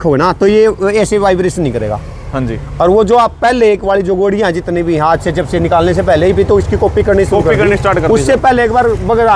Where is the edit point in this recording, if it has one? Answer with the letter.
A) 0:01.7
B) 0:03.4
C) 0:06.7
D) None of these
D